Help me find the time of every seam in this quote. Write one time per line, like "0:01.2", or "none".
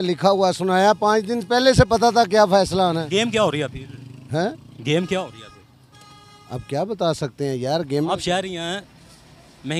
none